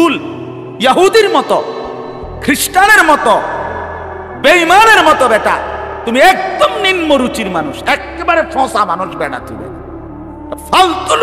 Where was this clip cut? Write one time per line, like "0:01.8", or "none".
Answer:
none